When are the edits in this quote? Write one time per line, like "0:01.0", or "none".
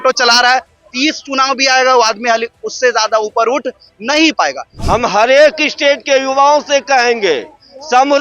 0:04.7